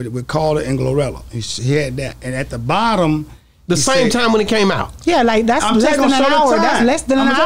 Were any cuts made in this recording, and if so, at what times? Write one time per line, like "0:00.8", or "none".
none